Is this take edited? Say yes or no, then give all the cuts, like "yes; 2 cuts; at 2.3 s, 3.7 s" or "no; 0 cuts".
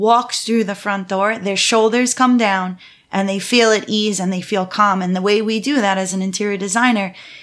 no; 0 cuts